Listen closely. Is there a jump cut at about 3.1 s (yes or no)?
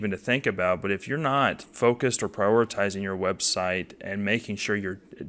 no